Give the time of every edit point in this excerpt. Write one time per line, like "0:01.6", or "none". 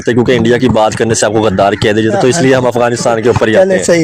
none